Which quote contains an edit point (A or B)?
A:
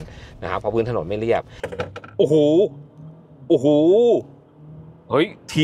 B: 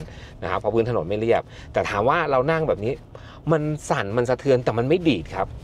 A